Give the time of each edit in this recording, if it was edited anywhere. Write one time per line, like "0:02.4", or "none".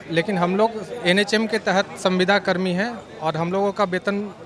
none